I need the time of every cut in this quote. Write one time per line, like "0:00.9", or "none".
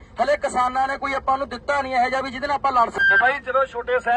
0:03.0